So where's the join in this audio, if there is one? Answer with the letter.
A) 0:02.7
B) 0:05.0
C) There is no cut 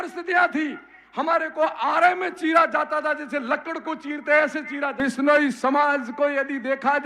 B